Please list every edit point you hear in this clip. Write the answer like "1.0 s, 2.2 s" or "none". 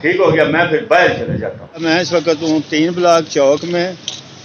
1.6 s